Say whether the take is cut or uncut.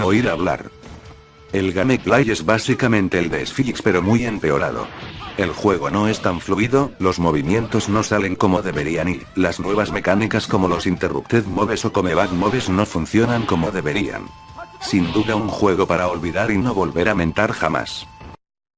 cut